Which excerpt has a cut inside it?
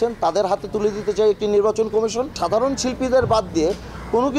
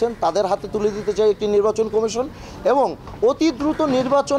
first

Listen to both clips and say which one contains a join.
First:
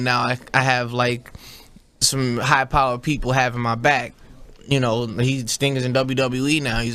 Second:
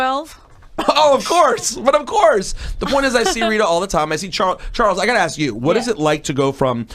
second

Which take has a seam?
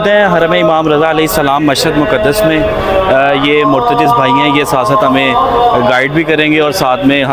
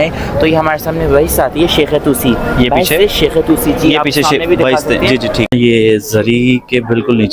second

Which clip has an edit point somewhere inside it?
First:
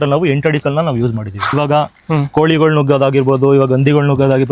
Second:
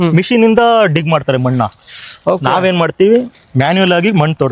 first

